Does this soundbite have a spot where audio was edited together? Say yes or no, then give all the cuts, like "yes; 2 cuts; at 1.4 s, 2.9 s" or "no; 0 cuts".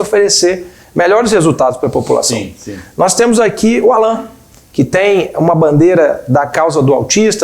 no; 0 cuts